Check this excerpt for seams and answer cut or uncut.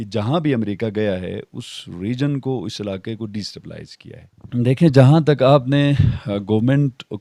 cut